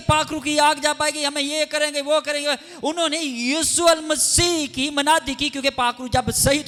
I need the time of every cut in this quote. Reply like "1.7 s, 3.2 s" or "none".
none